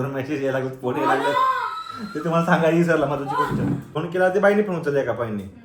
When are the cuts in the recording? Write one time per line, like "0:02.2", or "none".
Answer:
0:03.9